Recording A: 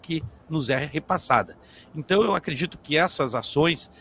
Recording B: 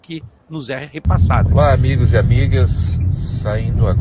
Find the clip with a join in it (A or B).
B